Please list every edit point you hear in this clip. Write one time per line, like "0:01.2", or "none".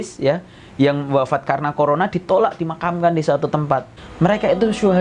0:04.0